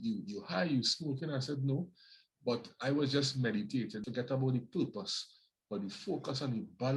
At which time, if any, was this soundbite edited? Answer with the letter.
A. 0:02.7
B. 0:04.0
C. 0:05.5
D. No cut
B